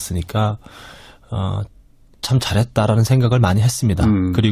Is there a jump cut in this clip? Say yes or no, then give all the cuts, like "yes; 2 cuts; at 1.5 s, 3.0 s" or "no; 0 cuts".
yes; 1 cut; at 3.5 s